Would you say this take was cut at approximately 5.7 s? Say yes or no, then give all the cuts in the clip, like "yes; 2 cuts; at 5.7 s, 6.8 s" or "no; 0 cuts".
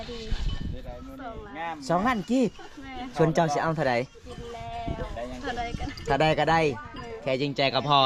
no; 0 cuts